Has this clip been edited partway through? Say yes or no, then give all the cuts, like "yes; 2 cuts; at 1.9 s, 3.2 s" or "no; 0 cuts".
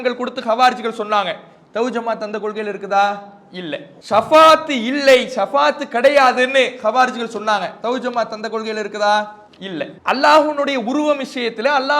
yes; 2 cuts; at 3.9 s, 9.9 s